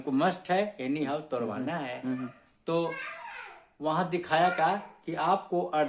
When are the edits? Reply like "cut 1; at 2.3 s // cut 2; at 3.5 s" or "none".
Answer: none